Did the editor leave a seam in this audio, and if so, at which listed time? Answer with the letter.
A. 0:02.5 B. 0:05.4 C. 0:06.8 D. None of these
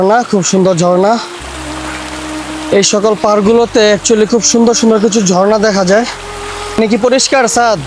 C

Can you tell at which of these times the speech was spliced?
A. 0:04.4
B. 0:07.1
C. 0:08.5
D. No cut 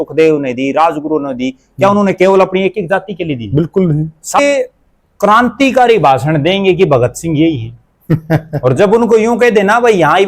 A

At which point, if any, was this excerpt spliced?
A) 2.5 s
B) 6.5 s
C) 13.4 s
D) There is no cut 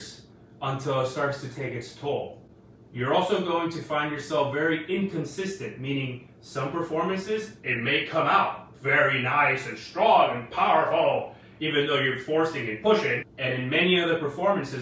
D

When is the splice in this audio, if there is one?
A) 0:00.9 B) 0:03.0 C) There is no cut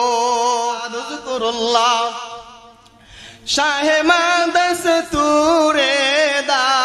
A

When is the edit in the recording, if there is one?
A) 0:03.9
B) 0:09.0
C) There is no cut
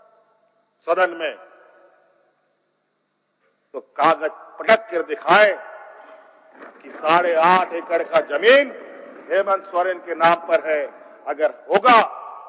C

